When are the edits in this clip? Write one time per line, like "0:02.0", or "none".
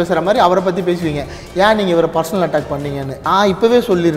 0:03.1